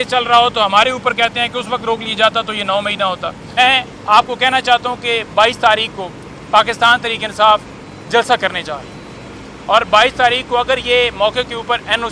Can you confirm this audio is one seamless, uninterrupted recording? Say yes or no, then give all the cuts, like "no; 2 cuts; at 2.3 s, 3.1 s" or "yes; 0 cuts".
no; 1 cut; at 3.6 s